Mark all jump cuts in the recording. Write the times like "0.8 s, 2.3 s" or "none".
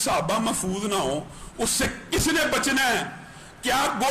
none